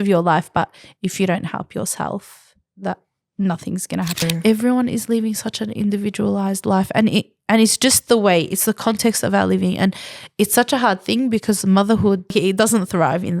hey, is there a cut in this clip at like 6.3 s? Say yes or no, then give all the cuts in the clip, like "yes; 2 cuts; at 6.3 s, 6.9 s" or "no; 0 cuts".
no; 2 cuts; at 4.2 s, 12.3 s